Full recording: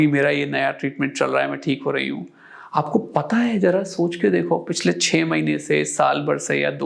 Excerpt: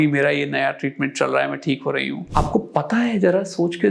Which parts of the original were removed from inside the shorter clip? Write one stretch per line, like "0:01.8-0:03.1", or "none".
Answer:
0:02.2-0:02.6

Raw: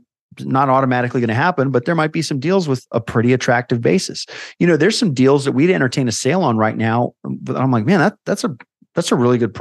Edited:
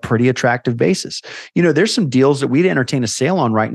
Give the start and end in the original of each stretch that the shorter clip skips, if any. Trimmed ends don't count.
none

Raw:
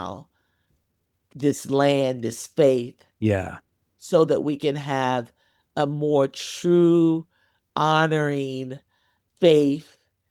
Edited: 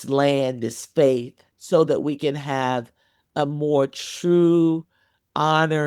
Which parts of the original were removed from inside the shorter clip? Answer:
0:03.0-0:03.8

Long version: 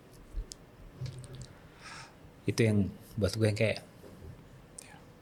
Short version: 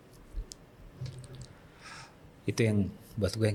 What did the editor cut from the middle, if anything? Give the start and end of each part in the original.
none

